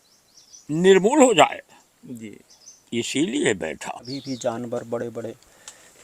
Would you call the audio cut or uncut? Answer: cut